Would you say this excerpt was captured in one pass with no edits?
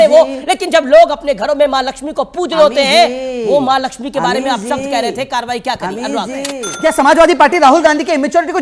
no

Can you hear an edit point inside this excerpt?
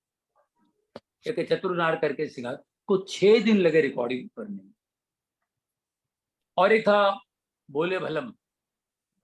no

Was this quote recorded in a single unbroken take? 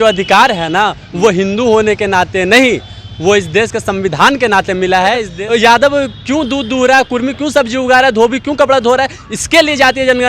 no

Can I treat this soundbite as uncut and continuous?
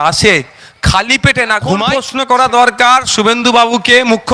no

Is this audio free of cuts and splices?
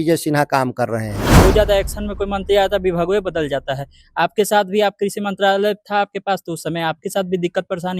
no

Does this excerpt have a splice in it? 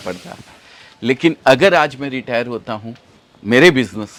no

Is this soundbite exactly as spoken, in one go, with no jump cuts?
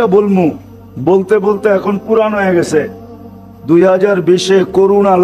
yes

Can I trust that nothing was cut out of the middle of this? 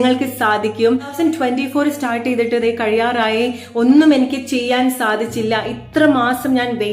no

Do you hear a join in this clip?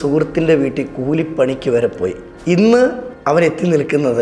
yes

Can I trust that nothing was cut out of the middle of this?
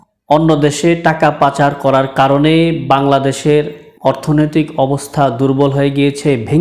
yes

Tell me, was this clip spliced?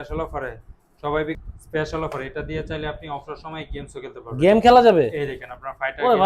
yes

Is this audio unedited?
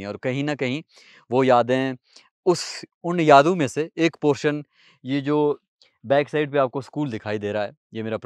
yes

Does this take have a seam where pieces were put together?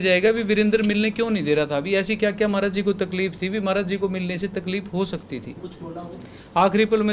yes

